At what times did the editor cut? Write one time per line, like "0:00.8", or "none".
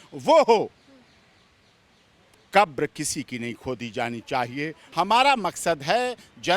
0:04.8